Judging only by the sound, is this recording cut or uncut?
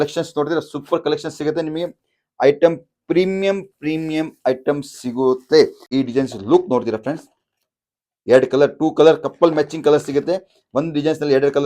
cut